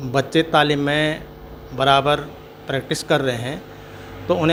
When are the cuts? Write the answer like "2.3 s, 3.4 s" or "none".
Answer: none